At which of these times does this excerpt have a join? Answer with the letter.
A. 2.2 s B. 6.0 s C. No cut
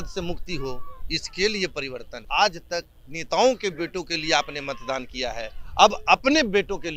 A